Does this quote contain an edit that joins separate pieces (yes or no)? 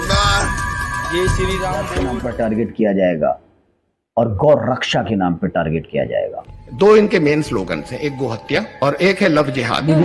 yes